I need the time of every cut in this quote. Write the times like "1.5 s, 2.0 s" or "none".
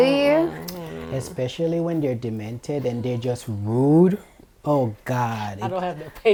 none